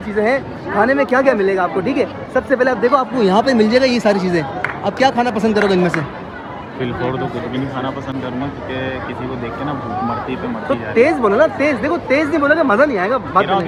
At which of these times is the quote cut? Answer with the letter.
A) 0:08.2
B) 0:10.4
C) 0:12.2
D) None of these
D